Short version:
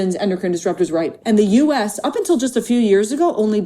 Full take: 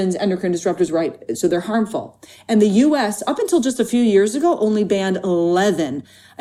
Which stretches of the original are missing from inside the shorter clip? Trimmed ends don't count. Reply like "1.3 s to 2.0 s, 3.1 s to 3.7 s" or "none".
1.1 s to 2.4 s